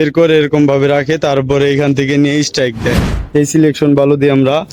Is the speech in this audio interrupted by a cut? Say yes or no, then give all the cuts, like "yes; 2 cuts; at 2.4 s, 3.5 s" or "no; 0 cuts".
yes; 1 cut; at 3.1 s